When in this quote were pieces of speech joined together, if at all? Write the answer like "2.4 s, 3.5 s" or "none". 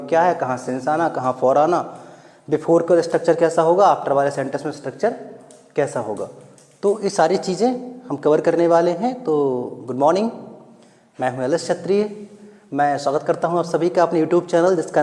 none